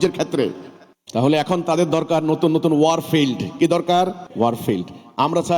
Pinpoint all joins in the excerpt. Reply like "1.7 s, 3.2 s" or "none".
4.2 s